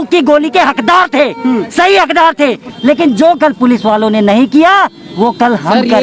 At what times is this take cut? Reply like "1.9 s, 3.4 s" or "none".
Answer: 2.7 s